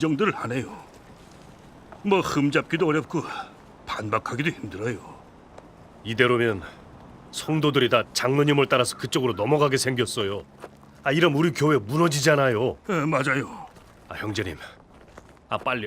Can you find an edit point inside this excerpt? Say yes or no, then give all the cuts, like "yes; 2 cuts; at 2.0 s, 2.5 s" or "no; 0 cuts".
yes; 1 cut; at 11.9 s